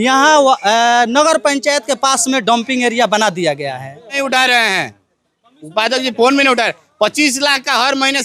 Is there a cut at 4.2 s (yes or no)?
yes